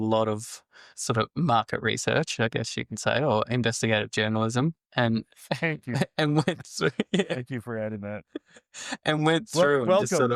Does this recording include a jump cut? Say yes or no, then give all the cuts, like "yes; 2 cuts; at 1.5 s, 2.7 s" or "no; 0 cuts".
no; 0 cuts